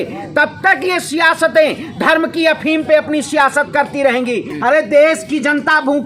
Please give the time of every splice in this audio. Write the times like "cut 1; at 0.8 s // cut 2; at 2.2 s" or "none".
cut 1; at 4.5 s